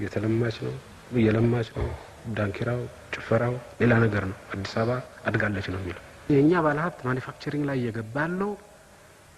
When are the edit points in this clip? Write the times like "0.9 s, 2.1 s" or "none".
6.2 s